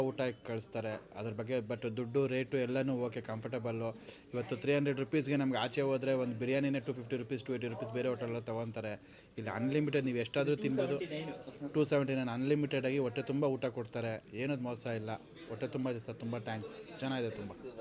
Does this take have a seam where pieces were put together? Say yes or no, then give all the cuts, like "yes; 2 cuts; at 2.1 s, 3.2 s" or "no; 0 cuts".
no; 0 cuts